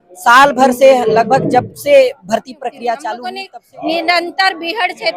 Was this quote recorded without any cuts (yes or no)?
no